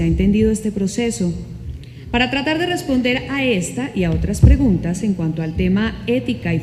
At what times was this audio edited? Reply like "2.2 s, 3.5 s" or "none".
none